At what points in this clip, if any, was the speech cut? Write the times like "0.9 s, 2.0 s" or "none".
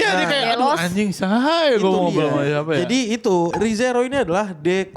3.5 s

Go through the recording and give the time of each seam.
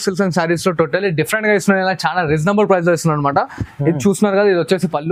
none

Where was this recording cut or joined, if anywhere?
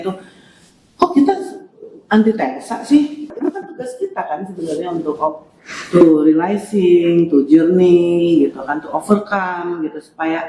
3.3 s

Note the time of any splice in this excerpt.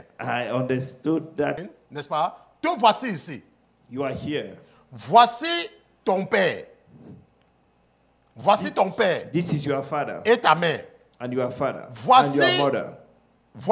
1.6 s

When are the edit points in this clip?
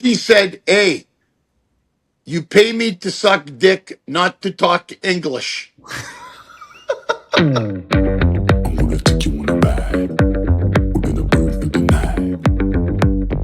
7.4 s

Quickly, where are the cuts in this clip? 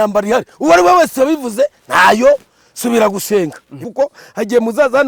3.8 s

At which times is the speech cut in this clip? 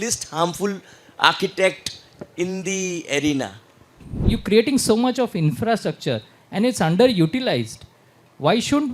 4.1 s

